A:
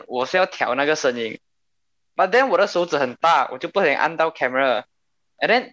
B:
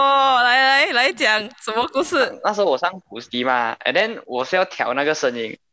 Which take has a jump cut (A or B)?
B